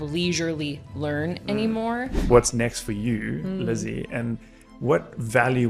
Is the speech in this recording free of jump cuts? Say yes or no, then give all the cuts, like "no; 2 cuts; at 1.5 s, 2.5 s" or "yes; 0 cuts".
no; 1 cut; at 2.2 s